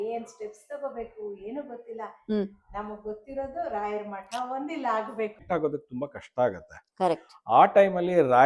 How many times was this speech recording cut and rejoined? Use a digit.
1